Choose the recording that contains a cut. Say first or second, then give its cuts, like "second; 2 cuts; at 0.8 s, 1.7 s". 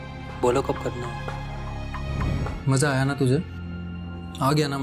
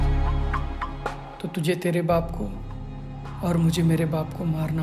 first; 1 cut; at 2.5 s